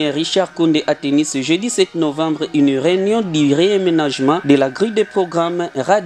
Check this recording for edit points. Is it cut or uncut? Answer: uncut